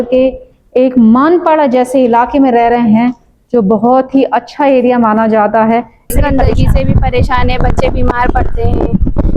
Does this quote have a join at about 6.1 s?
yes; 1 cut; at 6.1 s

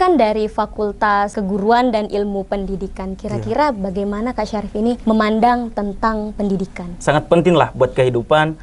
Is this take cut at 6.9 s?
yes; 2 cuts; at 1.3 s, 6.9 s

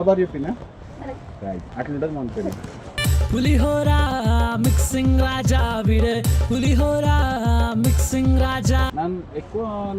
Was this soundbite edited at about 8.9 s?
yes; 1 cut; at 8.9 s

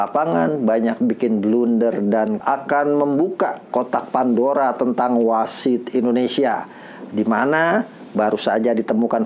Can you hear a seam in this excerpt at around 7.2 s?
no; 1 cut; at 2.4 s

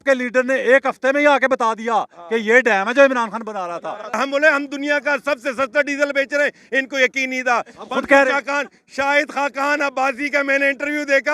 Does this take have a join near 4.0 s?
yes; 1 cut; at 4.0 s

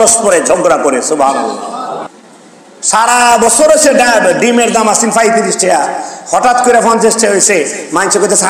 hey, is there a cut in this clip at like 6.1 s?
no; 1 cut; at 2.1 s

